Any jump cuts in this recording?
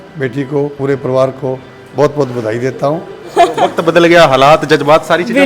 yes; 2 cuts; at 0.8 s, 3.2 s

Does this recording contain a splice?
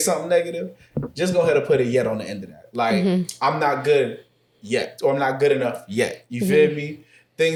no; 0 cuts

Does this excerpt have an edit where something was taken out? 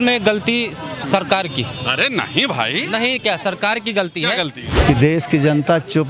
yes; 1 cut; at 4.7 s

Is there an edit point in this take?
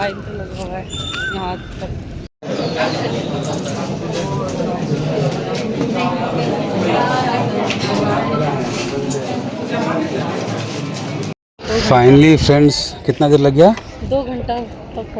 yes; 2 cuts; at 2.3 s, 11.4 s

